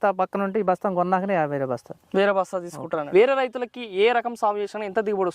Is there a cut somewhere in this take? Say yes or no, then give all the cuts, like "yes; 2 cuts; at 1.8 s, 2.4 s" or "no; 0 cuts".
yes; 1 cut; at 2.9 s